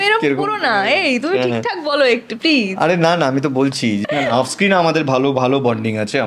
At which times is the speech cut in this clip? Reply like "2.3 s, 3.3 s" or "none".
4.1 s